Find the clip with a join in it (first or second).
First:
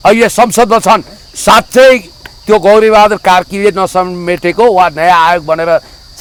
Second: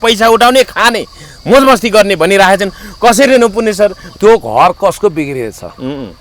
second